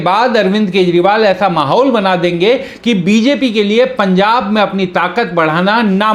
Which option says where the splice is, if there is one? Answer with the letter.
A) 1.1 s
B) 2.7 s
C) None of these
C